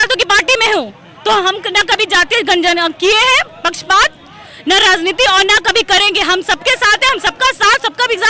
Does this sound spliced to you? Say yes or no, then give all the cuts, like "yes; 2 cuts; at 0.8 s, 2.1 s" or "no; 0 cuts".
no; 0 cuts